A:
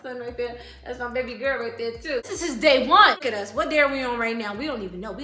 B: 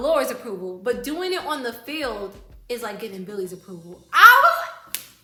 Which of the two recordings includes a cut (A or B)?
A